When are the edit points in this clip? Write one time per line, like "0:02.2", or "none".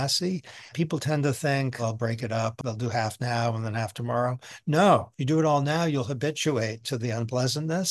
0:02.6
0:05.1